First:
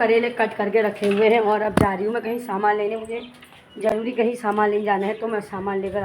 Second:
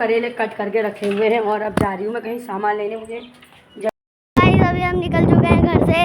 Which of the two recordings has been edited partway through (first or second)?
second